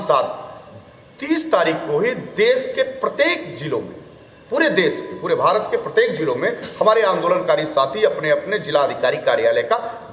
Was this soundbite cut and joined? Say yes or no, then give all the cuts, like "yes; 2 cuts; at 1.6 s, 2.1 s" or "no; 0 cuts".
no; 0 cuts